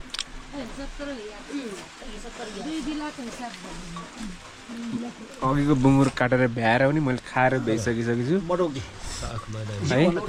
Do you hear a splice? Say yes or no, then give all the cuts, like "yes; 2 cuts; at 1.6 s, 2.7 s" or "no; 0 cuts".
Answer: no; 0 cuts